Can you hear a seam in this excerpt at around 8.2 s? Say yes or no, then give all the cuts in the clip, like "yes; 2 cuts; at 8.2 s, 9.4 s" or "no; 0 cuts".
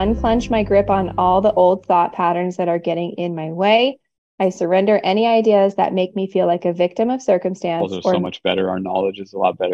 yes; 1 cut; at 8.2 s